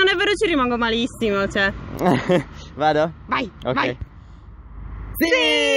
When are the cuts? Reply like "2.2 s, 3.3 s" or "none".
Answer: none